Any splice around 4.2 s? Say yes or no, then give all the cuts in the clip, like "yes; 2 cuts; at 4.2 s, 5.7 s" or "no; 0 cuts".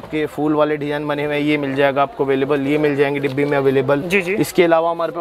no; 0 cuts